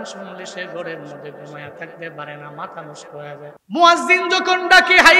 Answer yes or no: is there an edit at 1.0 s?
no